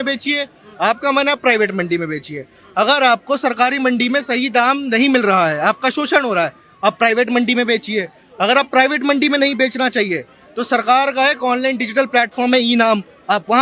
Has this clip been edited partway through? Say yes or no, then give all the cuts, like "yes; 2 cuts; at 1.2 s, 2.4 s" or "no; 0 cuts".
no; 0 cuts